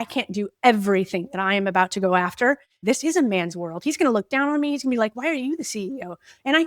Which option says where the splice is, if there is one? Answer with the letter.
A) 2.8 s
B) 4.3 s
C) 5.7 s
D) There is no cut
A